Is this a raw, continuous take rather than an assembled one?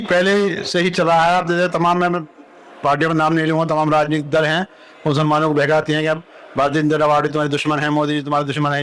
yes; 0 cuts

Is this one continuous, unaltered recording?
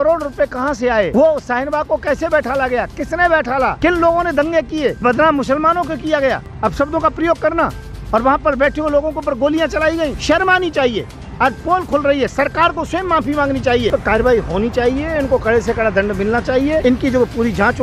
no; 7 cuts; at 1.1 s, 3.8 s, 5.0 s, 6.5 s, 10.2 s, 13.9 s, 16.8 s

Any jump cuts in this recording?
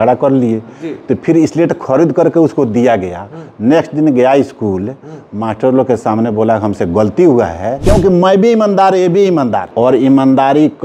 yes; 2 cuts; at 7.8 s, 9.6 s

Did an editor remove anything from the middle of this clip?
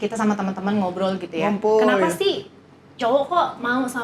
no; 0 cuts

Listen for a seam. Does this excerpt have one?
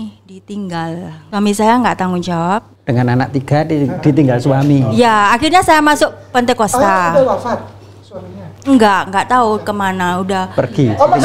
yes; 2 cuts; at 1.2 s, 2.8 s

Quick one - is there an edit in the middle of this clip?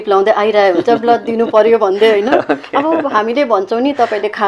no; 0 cuts

